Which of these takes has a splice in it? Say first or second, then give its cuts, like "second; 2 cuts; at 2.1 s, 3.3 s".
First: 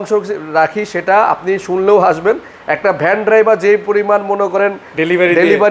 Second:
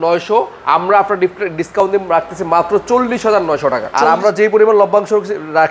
second; 1 cut; at 3.9 s